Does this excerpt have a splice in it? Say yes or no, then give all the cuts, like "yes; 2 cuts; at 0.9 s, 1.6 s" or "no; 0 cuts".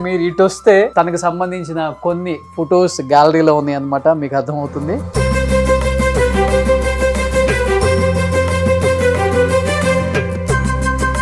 yes; 1 cut; at 0.9 s